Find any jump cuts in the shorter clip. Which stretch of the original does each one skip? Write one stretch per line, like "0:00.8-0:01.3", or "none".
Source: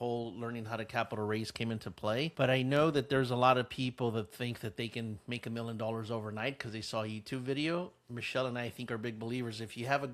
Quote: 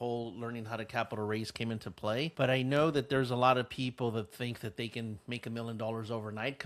none